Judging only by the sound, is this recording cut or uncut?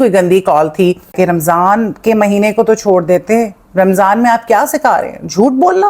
cut